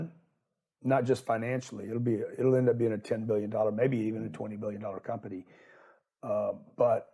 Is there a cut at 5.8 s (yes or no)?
no